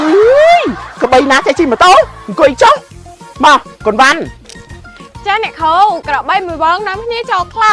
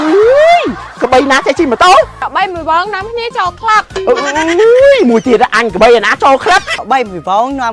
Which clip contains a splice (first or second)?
second